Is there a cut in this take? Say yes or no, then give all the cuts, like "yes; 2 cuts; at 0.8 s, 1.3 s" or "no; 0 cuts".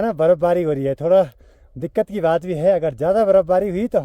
no; 0 cuts